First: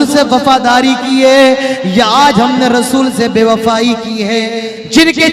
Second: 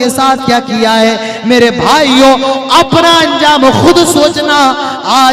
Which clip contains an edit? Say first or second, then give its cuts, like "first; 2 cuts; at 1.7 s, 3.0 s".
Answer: first; 1 cut; at 4.4 s